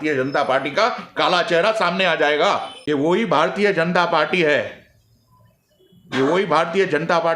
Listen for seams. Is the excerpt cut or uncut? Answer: cut